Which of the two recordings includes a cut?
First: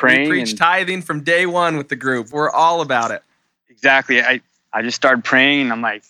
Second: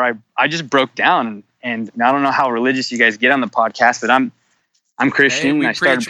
first; 1 cut; at 4.5 s

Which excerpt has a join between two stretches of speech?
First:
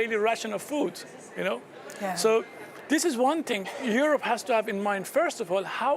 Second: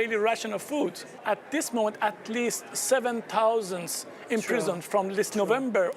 second; 1 cut; at 1.2 s

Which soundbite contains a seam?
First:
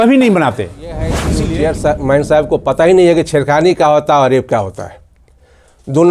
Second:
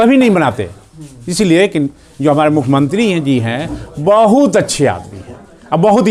first; 1 cut; at 1.4 s

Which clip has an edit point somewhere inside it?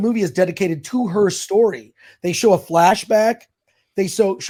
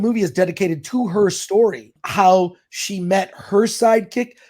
second; 1 cut; at 2.0 s

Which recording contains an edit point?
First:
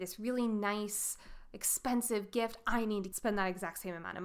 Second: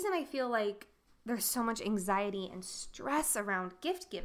first; 1 cut; at 3.1 s

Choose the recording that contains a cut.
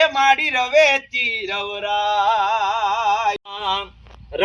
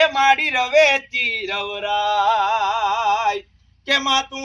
first; 1 cut; at 3.5 s

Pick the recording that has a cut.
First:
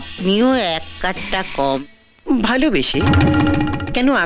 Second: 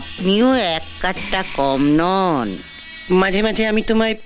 first; 1 cut; at 1.8 s

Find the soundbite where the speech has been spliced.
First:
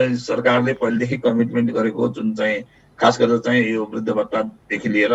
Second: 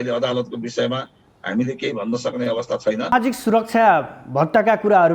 second; 1 cut; at 3.1 s

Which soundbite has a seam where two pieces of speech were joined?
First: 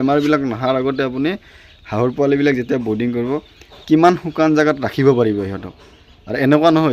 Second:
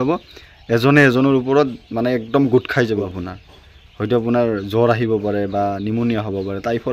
second; 1 cut; at 3.1 s

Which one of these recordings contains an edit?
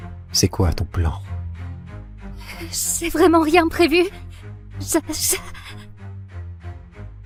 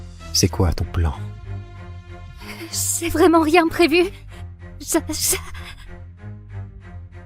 second; 2 cuts; at 1.2 s, 2.6 s

